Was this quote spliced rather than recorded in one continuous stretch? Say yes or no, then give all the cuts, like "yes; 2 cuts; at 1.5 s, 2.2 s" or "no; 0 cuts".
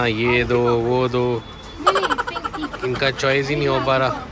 no; 0 cuts